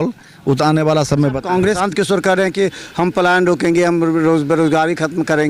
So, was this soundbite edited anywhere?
yes; 1 cut; at 1.8 s

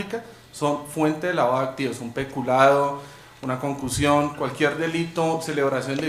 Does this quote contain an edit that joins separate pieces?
no; 0 cuts

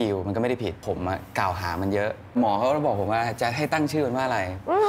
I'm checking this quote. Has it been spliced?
yes; 2 cuts; at 0.8 s, 2.3 s

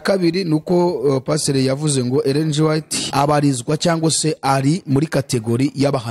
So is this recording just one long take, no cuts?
no; 1 cut; at 3.0 s

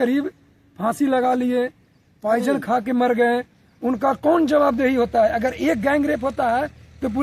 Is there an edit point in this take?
no; 0 cuts

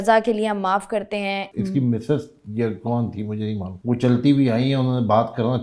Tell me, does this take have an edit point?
yes; 2 cuts; at 1.5 s, 3.7 s

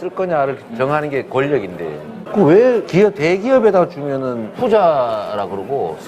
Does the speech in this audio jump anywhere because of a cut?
yes; 2 cuts; at 2.9 s, 4.5 s

